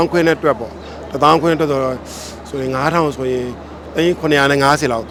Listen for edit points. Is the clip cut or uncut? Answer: uncut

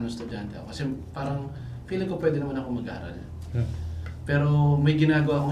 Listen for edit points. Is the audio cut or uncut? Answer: uncut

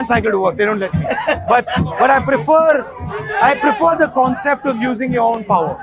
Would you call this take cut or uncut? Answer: uncut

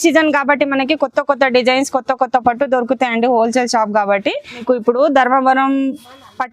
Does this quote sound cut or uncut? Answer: cut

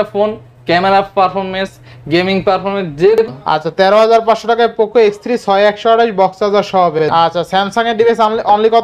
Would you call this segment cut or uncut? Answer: cut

